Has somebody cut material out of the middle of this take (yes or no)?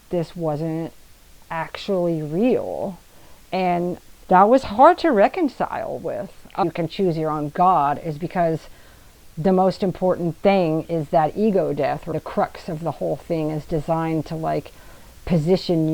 yes